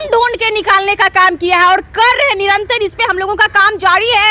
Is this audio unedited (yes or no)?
yes